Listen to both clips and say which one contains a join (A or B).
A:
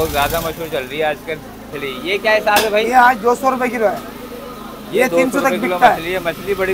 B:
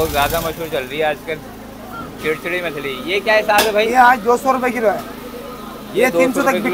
A